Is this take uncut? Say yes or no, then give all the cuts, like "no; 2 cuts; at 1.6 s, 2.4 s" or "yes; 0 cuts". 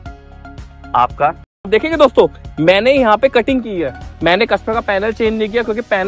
no; 2 cuts; at 1.7 s, 4.0 s